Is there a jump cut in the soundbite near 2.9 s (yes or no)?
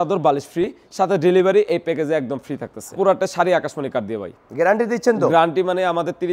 yes